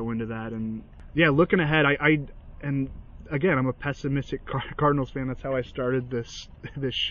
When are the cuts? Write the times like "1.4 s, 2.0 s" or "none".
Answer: 0.9 s